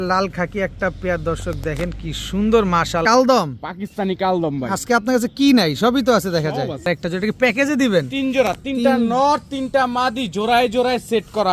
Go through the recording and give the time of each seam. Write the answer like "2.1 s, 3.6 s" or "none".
3.0 s, 6.8 s